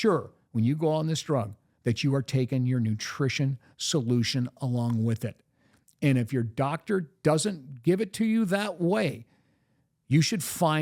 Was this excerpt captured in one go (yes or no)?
yes